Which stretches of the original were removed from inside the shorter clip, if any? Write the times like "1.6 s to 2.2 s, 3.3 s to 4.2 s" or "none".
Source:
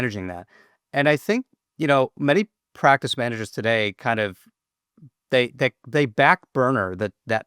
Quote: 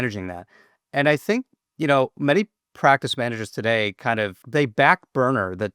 4.4 s to 5.8 s